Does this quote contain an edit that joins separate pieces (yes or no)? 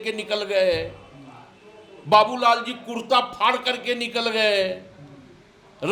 no